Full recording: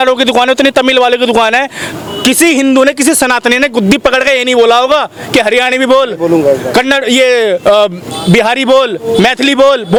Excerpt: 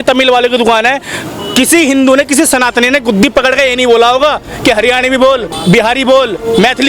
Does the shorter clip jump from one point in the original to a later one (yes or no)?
yes